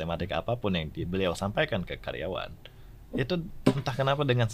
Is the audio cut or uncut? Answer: uncut